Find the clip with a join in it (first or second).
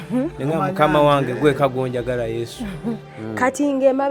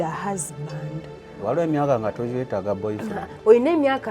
first